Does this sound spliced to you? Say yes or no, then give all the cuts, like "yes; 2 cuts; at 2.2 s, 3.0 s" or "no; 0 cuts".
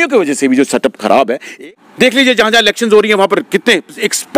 yes; 1 cut; at 1.4 s